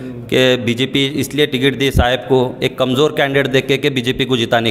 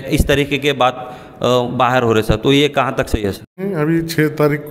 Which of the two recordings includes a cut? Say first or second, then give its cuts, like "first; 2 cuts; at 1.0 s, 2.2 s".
second; 1 cut; at 3.7 s